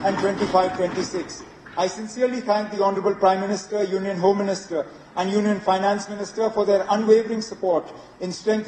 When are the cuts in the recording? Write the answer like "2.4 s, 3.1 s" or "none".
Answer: none